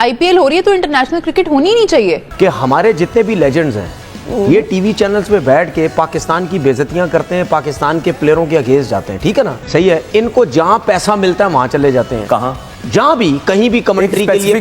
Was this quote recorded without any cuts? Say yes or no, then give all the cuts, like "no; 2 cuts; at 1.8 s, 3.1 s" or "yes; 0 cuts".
yes; 0 cuts